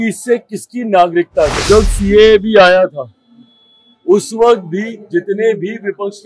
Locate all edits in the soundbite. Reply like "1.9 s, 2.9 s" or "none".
1.6 s